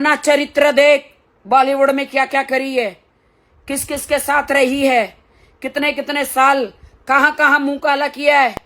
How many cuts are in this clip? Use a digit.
0